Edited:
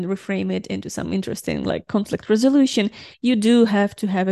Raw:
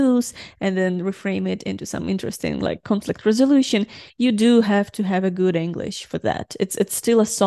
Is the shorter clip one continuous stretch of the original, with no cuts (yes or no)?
yes